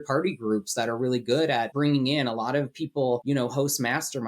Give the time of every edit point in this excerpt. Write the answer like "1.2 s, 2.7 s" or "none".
1.7 s, 3.2 s